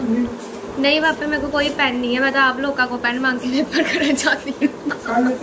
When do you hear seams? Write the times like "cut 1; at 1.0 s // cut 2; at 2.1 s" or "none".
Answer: none